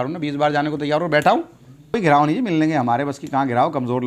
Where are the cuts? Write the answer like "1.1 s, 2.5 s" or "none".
1.9 s